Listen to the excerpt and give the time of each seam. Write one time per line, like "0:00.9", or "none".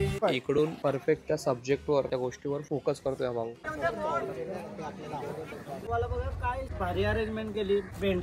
0:03.6
0:05.9